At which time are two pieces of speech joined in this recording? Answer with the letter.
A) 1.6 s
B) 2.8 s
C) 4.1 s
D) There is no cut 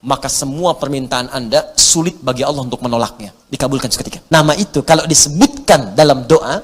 C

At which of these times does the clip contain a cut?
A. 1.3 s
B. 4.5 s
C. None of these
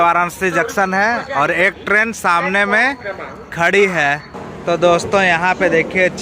B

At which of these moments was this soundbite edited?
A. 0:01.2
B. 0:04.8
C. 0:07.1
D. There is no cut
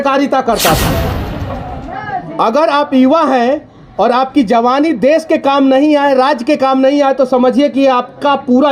A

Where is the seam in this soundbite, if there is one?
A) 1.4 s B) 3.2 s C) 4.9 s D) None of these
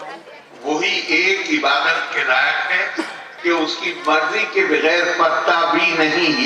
B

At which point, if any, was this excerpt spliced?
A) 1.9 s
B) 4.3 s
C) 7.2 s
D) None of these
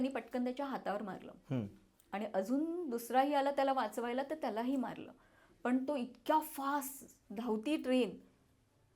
D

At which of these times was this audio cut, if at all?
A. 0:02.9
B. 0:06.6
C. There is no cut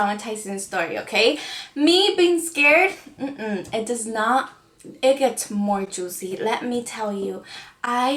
C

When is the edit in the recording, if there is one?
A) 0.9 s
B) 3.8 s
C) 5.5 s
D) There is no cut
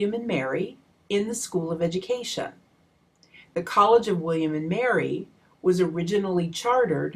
B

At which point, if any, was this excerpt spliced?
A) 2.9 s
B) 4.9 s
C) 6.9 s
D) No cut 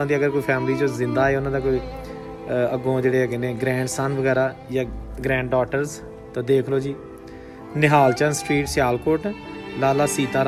D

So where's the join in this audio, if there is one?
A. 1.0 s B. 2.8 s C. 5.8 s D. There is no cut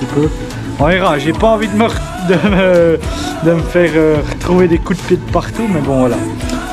D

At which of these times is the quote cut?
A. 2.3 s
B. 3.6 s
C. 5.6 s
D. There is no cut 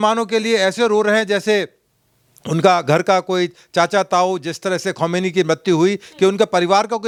D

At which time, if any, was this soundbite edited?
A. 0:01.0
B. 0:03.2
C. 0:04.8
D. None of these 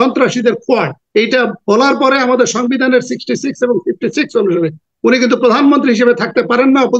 A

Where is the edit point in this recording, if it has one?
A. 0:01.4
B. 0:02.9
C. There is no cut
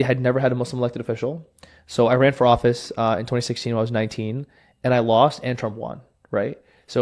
C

